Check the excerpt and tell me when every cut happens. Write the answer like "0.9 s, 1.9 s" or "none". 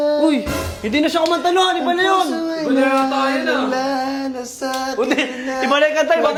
none